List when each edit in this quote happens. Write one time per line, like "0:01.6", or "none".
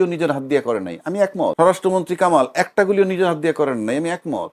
none